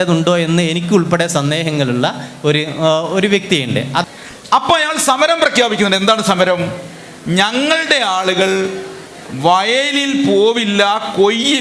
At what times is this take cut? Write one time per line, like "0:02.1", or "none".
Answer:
0:04.0